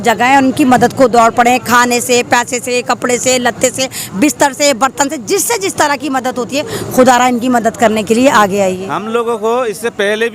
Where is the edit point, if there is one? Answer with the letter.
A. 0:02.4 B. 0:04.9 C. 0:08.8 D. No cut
C